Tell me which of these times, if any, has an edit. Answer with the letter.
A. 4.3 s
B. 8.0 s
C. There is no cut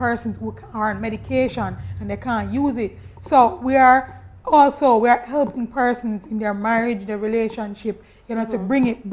C